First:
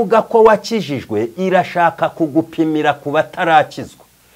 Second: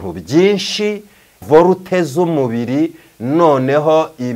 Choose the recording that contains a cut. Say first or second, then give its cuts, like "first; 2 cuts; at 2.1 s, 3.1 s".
second; 1 cut; at 1.4 s